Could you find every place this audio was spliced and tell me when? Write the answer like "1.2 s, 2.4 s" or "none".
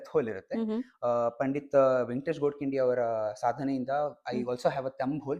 none